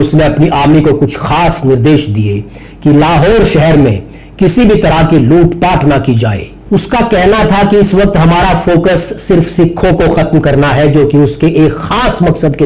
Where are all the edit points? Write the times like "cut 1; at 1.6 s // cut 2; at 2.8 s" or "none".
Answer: none